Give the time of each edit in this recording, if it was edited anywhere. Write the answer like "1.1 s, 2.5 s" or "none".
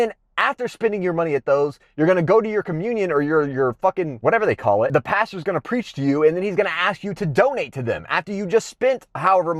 4.9 s